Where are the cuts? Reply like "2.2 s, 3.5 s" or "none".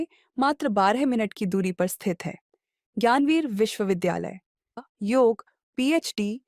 4.8 s